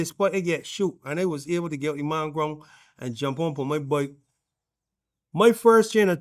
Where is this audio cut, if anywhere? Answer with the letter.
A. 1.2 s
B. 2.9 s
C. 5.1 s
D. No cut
D